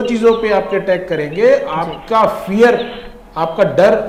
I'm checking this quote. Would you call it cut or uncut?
uncut